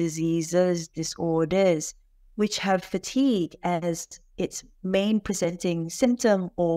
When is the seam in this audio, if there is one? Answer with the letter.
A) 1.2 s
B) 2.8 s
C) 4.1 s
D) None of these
D